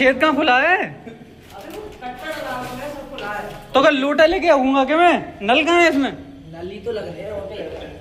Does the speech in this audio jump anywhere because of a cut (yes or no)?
no